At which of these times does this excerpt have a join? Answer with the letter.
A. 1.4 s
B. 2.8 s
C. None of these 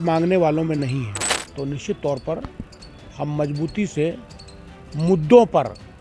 A